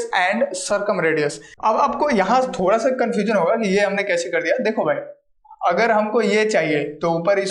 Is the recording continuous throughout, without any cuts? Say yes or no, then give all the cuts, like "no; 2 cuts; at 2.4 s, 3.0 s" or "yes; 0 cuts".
no; 1 cut; at 1.5 s